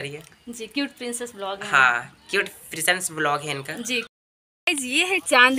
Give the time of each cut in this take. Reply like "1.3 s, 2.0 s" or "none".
4.1 s